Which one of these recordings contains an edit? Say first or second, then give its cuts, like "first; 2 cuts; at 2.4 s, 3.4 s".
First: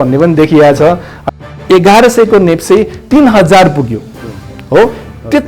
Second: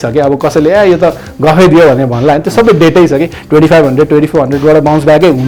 first; 1 cut; at 1.4 s